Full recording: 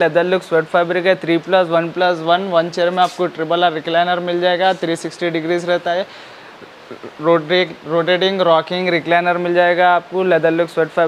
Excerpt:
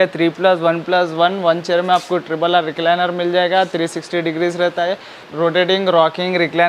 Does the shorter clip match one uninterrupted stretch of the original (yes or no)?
no